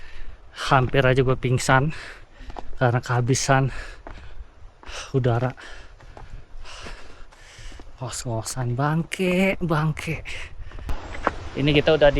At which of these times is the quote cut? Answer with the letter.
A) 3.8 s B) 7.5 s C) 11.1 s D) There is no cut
C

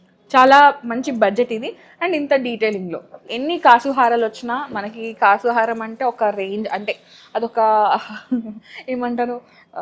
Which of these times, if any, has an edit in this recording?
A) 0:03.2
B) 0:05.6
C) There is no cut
A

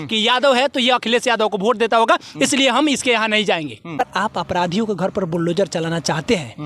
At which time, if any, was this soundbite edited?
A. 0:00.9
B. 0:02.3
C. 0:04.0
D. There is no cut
C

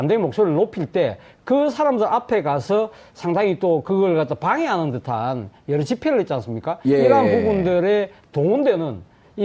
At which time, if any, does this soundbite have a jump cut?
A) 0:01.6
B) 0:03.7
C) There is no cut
A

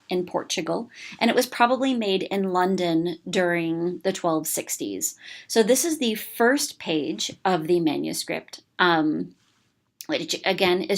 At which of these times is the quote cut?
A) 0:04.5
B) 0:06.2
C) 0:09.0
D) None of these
B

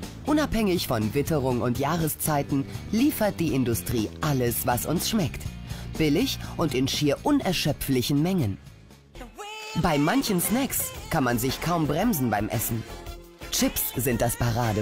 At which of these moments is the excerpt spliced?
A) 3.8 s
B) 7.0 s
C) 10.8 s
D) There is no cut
A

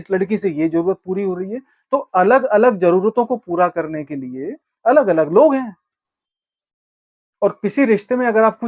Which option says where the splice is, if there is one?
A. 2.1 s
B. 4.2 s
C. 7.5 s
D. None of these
D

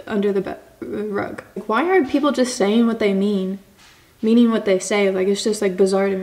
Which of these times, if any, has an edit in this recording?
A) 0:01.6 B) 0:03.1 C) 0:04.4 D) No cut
A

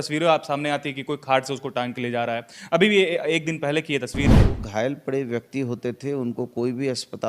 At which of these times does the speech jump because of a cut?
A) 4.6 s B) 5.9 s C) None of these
A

